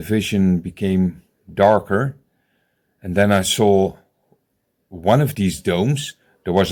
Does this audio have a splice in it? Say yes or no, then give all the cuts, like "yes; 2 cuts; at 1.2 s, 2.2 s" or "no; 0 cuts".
no; 0 cuts